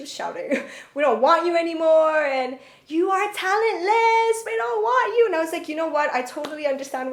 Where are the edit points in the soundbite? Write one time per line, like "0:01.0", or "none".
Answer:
none